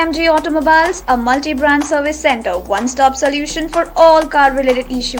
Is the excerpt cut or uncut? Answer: uncut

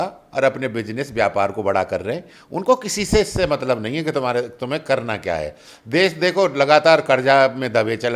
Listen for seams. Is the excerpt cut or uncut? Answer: uncut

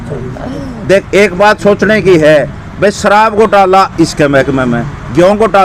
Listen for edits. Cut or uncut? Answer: uncut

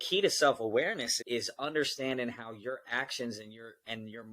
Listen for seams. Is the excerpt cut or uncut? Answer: cut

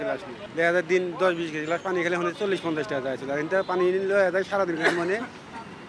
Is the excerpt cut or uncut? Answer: uncut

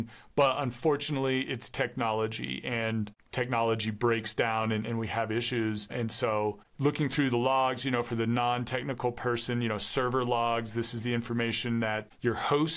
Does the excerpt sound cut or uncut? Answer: cut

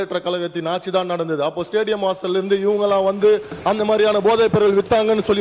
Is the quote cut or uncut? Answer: uncut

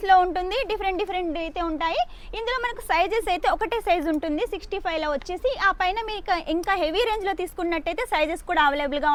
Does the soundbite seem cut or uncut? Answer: uncut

